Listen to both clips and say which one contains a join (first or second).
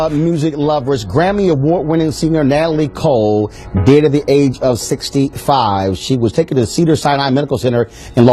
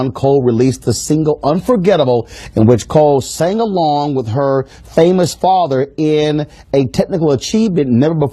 second